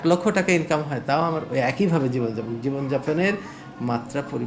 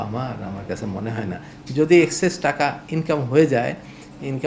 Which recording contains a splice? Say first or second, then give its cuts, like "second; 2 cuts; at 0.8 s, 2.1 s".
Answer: second; 1 cut; at 1.5 s